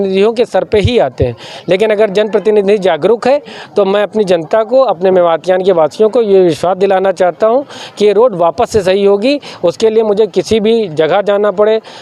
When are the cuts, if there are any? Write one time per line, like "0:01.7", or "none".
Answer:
none